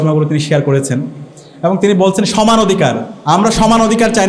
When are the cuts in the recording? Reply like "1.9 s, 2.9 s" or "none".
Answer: 3.1 s